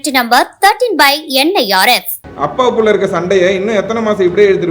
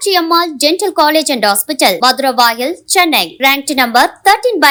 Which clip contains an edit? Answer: first; 1 cut; at 2.2 s

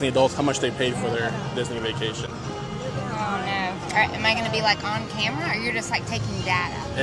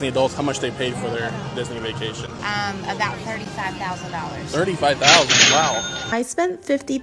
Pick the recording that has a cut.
second; 2 cuts; at 2.4 s, 6.0 s

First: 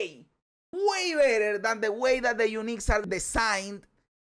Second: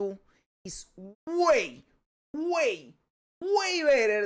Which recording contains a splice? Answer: first; 1 cut; at 3.0 s

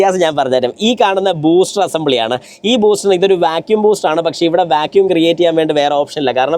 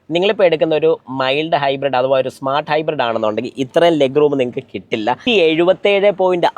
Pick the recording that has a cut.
second; 1 cut; at 5.2 s

